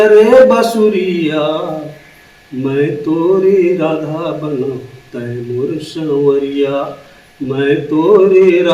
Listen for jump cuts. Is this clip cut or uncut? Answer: uncut